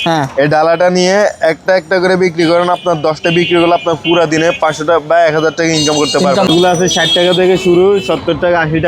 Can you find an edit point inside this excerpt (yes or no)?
yes